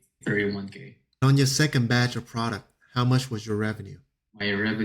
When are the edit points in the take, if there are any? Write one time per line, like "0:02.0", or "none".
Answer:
0:01.2